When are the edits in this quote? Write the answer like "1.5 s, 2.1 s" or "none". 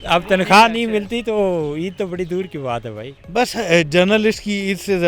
3.2 s